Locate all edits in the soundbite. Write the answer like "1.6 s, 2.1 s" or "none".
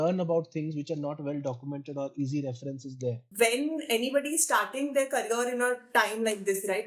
3.2 s